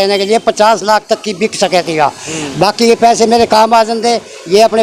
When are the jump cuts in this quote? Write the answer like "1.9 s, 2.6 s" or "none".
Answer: none